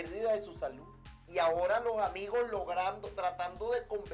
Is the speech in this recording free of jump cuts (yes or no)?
yes